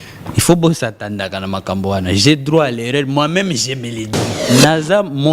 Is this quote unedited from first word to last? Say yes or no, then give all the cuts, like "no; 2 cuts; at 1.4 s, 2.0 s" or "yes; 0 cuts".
no; 1 cut; at 4.3 s